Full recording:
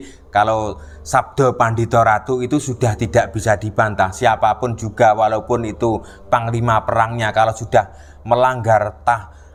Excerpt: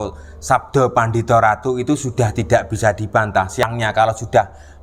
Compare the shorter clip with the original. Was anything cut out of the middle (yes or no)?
yes